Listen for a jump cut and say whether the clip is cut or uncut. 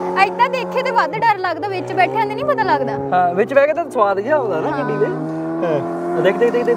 uncut